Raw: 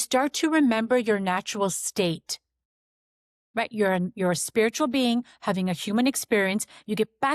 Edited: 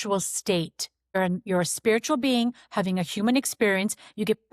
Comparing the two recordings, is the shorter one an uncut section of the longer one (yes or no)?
no